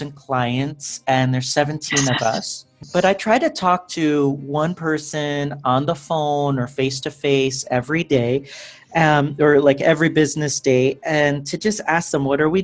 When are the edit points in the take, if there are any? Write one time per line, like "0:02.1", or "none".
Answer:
0:02.8